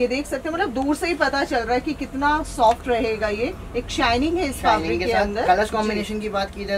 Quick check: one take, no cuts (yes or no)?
yes